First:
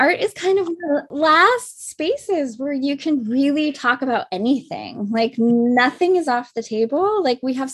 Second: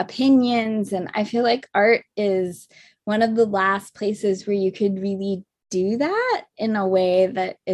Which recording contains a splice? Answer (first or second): first